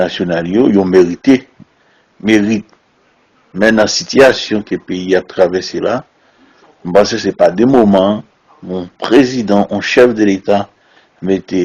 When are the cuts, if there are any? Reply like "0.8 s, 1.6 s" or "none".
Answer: 3.7 s